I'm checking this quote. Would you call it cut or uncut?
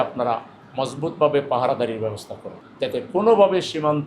cut